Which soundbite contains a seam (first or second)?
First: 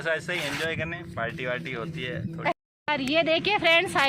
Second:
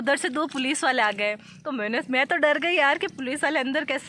first